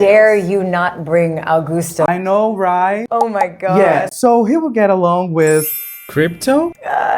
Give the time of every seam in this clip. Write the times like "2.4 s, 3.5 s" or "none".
none